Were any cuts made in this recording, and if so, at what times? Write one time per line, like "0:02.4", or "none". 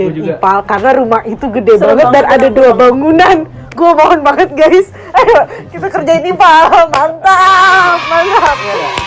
none